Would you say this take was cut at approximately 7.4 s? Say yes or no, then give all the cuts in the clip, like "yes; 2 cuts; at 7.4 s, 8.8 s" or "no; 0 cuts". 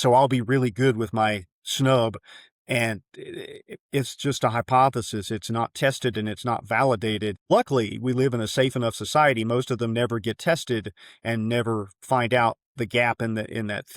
yes; 1 cut; at 7.4 s